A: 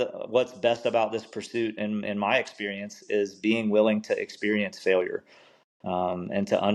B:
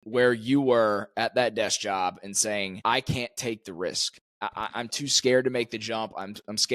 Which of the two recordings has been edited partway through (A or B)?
B